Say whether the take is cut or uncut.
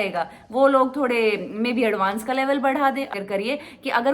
cut